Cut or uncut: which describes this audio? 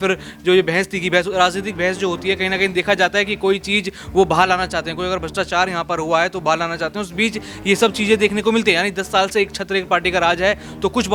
uncut